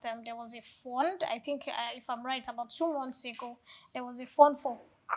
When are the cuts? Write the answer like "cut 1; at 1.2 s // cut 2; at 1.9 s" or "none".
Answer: none